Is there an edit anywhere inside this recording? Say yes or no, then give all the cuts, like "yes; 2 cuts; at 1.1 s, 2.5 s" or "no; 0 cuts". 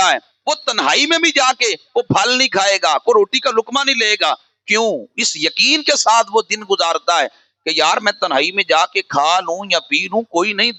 no; 0 cuts